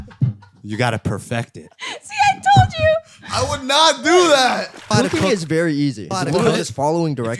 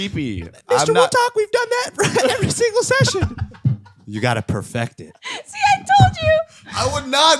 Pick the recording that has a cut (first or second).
first